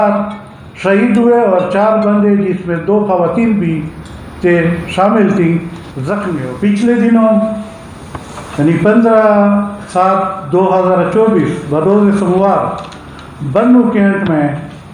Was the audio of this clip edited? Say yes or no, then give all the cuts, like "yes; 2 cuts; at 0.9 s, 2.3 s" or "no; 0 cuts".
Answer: yes; 1 cut; at 6.4 s